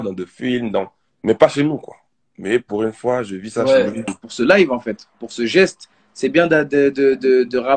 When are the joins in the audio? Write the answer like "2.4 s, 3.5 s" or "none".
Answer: 4.2 s